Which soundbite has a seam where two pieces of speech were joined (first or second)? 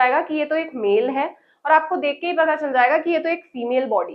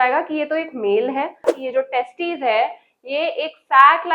second